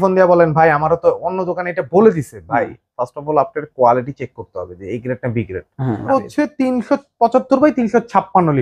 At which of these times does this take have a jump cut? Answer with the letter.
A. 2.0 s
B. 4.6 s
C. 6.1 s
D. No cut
C